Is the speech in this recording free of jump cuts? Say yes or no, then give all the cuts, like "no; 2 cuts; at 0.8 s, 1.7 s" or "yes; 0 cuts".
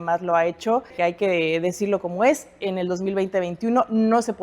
no; 1 cut; at 0.9 s